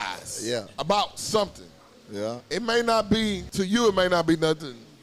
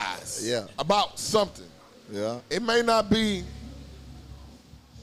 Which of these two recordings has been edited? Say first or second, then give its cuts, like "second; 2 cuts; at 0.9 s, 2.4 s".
first; 1 cut; at 3.4 s